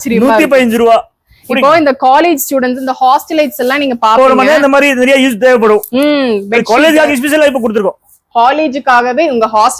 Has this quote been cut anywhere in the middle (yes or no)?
no